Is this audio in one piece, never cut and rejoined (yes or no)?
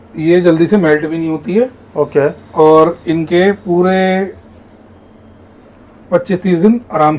yes